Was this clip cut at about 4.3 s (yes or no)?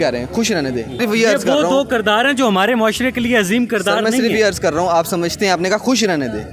no